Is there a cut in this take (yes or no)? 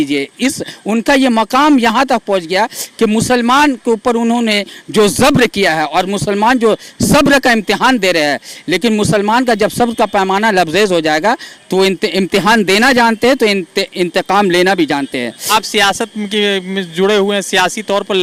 no